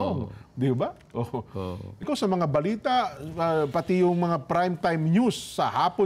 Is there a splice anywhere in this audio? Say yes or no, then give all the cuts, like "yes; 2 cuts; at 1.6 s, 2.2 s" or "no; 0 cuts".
yes; 1 cut; at 2.0 s